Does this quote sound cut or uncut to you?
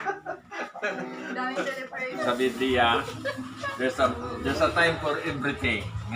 cut